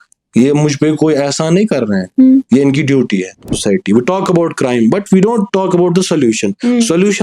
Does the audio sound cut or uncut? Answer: cut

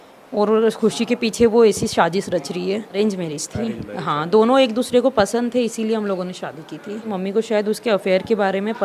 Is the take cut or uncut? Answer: cut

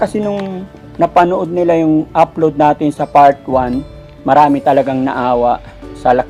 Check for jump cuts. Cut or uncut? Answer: uncut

